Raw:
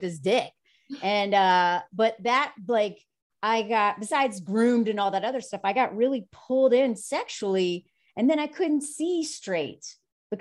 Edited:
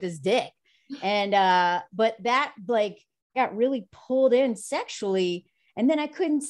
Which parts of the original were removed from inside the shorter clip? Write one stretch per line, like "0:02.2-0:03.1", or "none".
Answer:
0:03.3-0:05.7